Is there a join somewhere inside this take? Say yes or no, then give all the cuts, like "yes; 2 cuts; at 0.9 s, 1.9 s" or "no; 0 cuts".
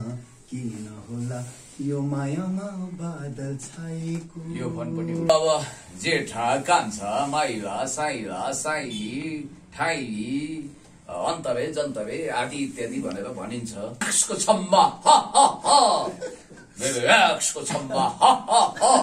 yes; 2 cuts; at 5.3 s, 14.1 s